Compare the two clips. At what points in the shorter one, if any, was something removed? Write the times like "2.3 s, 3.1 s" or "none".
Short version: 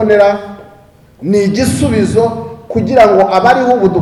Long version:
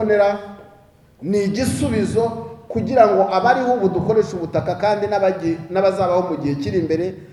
none